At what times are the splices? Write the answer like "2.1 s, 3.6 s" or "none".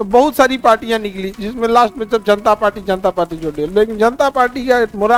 none